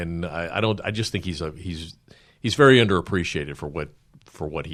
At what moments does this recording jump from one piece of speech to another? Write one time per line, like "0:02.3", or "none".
none